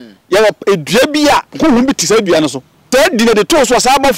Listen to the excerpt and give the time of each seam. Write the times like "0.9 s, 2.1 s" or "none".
1.5 s, 2.7 s